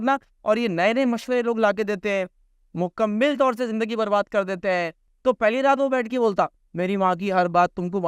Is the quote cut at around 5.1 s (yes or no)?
yes